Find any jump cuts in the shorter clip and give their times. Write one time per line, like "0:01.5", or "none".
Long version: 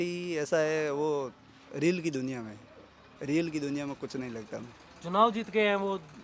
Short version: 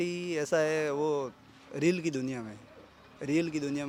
none